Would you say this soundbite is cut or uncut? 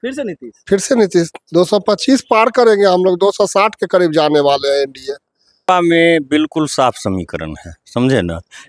cut